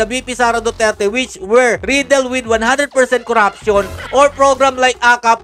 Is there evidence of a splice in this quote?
no; 0 cuts

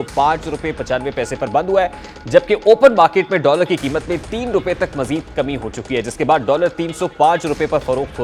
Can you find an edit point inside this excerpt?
no; 0 cuts

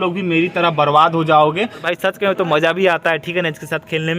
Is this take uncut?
no; 1 cut; at 1.9 s

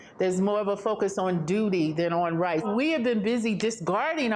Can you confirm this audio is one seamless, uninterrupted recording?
no; 1 cut; at 2.6 s

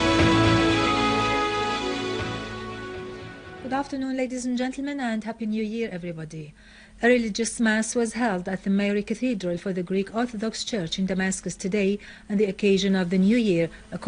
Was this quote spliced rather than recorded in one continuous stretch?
no; 0 cuts

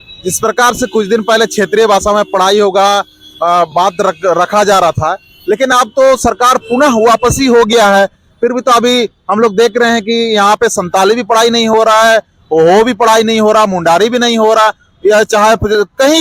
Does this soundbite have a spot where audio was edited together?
no; 0 cuts

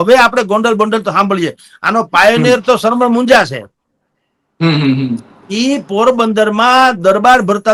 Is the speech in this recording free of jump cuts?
yes; 0 cuts

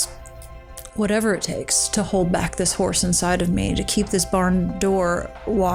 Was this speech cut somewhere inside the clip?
no; 0 cuts

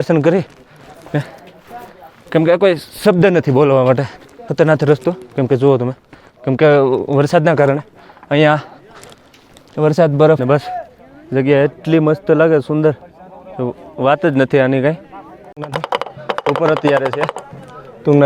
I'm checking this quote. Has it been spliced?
yes; 3 cuts; at 4.4 s, 10.4 s, 15.6 s

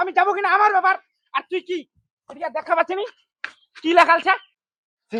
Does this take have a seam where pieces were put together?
no; 0 cuts

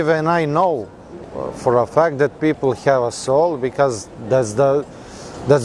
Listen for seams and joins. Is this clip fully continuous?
yes; 0 cuts

